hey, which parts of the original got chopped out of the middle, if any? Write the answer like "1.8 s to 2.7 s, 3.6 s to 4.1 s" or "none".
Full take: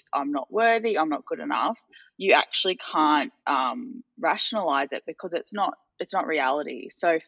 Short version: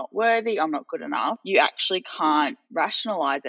1.8 s to 2.2 s, 3.3 s to 4.1 s